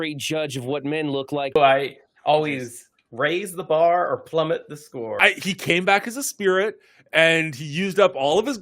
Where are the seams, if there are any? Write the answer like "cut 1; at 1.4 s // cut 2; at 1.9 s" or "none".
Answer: cut 1; at 1.6 s // cut 2; at 5.2 s